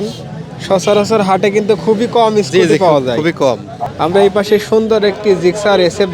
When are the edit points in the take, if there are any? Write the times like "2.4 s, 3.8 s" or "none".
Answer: 3.8 s